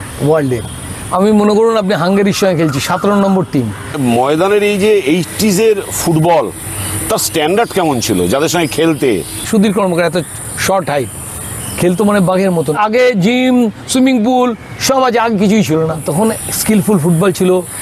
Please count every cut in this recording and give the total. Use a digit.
4